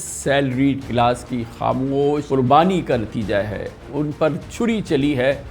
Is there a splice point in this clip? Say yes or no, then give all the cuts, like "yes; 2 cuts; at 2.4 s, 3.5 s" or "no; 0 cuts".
yes; 1 cut; at 2.2 s